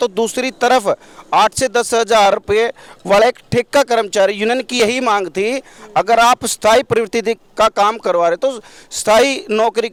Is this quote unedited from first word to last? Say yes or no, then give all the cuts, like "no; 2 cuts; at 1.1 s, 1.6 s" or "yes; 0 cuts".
yes; 0 cuts